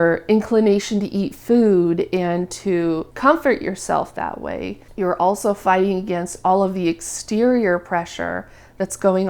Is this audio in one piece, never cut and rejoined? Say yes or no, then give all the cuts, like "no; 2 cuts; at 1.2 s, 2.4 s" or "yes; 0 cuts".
yes; 0 cuts